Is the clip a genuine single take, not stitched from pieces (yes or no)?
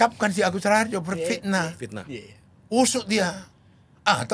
yes